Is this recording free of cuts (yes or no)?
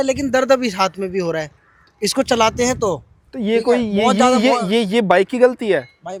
yes